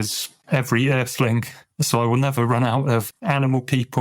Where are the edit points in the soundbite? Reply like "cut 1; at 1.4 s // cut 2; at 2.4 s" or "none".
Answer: cut 1; at 3.1 s